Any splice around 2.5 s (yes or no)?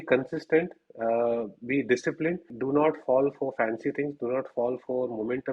yes